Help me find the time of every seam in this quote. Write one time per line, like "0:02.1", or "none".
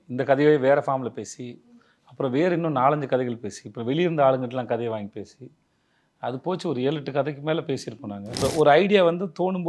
0:08.4

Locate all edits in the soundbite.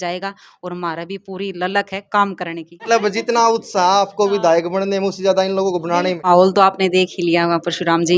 0:02.8
0:06.2

